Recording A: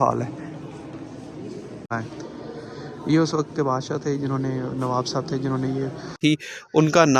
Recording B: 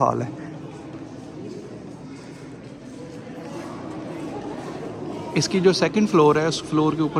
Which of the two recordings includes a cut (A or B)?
A